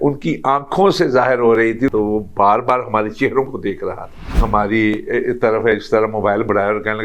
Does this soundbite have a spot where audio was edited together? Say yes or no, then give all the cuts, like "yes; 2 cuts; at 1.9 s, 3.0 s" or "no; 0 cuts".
yes; 2 cuts; at 1.9 s, 4.4 s